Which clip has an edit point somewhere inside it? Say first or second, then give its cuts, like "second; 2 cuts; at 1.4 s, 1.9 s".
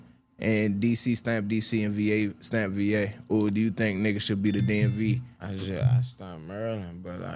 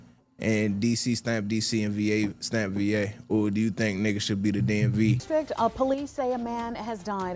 second; 1 cut; at 5.2 s